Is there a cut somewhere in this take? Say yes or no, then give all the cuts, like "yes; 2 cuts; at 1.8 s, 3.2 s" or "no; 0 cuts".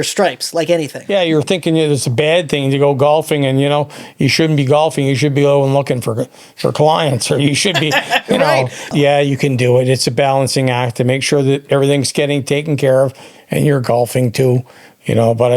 yes; 2 cuts; at 1.0 s, 8.9 s